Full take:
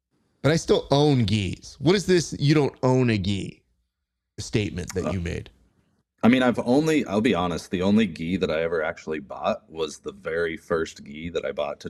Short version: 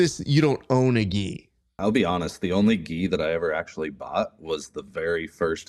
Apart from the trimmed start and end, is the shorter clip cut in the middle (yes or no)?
yes